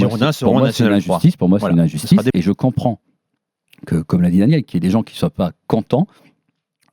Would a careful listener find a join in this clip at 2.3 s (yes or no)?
yes